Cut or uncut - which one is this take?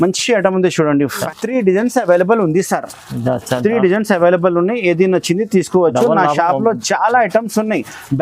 cut